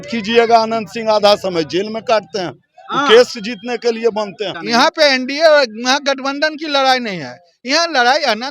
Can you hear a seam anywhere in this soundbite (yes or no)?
yes